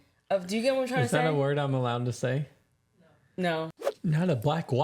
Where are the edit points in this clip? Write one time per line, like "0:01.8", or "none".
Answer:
0:03.8